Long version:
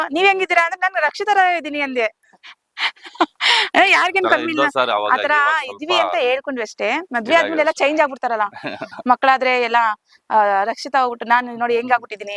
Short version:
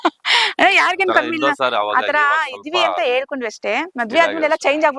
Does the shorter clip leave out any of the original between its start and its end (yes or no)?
no